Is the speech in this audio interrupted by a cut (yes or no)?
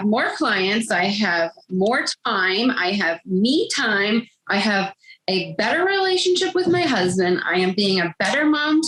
no